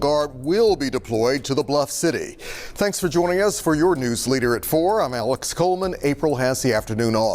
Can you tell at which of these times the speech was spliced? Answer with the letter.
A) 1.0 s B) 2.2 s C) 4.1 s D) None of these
D